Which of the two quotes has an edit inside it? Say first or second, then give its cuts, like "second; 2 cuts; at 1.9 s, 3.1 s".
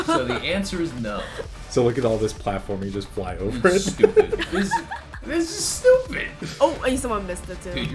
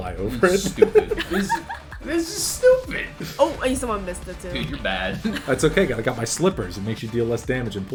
first; 1 cut; at 1.4 s